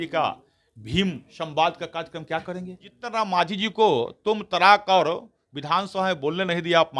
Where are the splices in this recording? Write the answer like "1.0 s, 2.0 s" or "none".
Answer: 3.0 s